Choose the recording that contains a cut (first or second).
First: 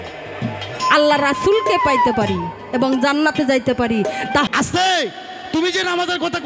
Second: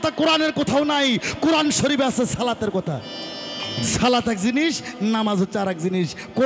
first